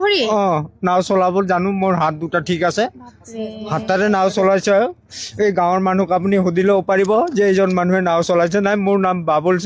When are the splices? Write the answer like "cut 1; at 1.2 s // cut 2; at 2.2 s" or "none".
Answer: none